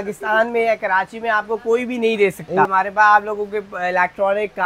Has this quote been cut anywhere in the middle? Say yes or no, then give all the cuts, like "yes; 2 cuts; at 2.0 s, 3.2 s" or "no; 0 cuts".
yes; 1 cut; at 2.7 s